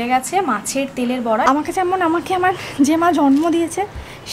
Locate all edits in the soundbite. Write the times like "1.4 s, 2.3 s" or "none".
1.4 s